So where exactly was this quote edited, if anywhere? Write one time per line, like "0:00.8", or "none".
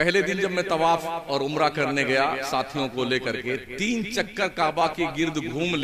none